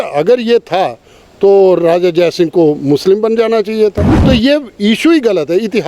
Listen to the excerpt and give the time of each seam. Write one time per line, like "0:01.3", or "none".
0:04.1